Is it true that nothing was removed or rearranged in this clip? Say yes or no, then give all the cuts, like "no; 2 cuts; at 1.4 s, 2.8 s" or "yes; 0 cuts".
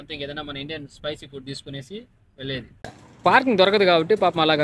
no; 1 cut; at 2.7 s